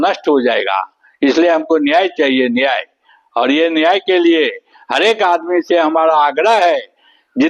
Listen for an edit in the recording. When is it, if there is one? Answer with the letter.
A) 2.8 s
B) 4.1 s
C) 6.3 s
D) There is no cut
D